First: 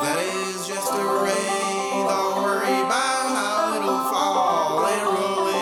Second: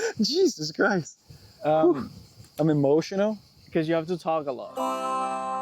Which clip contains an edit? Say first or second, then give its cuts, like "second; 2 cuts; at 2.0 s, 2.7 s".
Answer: second; 1 cut; at 4.7 s